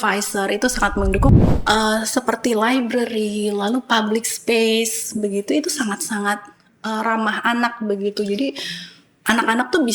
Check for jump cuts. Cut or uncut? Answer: cut